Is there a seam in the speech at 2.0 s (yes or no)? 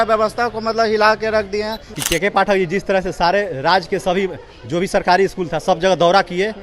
yes